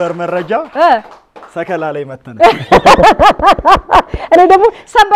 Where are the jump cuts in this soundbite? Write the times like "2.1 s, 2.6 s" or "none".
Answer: none